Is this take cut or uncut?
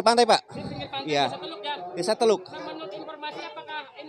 uncut